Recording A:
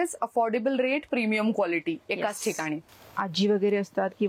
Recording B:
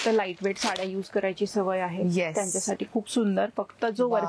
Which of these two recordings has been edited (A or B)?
A